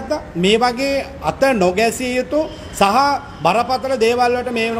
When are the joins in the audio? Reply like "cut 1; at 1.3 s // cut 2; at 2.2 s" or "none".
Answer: none